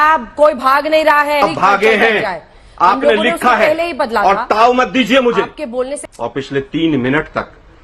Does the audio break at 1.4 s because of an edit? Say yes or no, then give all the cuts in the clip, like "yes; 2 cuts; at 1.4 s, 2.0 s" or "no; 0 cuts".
yes; 2 cuts; at 1.4 s, 6.0 s